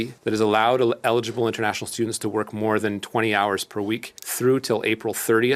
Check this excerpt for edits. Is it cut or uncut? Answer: uncut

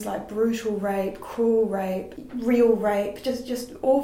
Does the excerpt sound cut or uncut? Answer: uncut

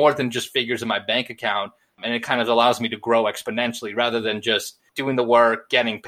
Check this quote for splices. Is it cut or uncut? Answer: cut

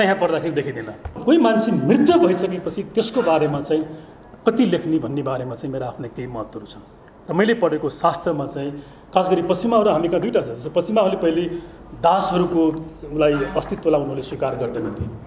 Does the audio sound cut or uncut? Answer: cut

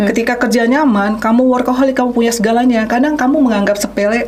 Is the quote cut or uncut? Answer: uncut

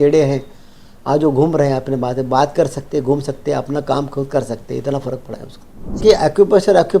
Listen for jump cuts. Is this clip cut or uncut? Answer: cut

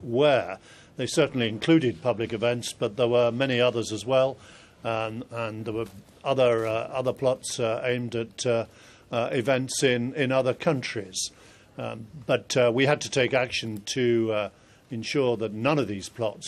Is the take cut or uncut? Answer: uncut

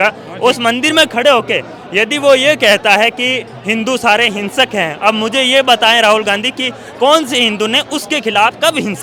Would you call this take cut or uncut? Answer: uncut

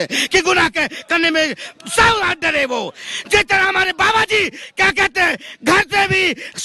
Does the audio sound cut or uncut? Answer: uncut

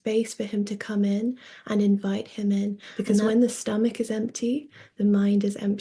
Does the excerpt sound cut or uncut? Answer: cut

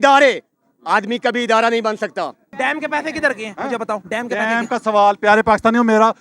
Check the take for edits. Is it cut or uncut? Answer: cut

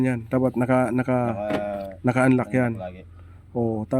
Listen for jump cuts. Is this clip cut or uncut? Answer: uncut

